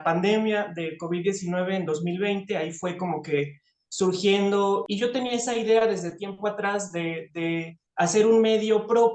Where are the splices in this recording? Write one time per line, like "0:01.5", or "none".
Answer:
0:04.8